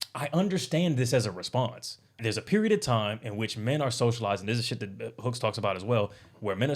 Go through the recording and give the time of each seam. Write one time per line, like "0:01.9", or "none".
0:02.2